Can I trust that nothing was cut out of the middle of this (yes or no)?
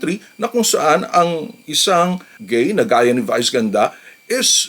no